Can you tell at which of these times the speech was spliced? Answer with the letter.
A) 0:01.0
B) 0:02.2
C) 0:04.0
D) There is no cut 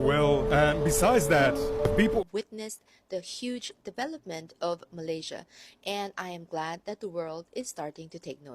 B